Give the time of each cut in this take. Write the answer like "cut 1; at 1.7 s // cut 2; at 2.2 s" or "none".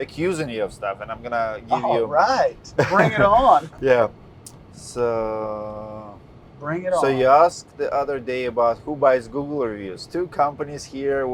none